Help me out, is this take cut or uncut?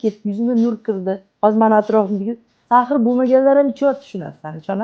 cut